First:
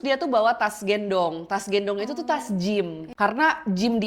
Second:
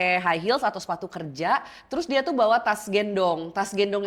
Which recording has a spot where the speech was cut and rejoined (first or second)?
first